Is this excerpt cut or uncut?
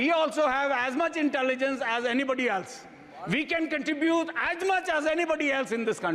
uncut